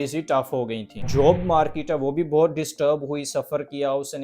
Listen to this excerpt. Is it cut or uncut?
cut